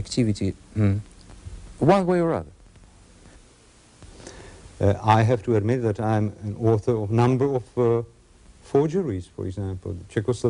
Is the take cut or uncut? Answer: cut